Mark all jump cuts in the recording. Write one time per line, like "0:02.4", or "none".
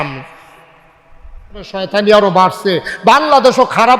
0:01.8